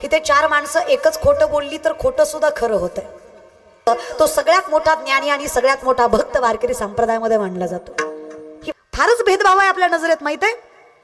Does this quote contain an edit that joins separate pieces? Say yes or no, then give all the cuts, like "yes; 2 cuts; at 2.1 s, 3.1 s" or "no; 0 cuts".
yes; 2 cuts; at 3.9 s, 8.7 s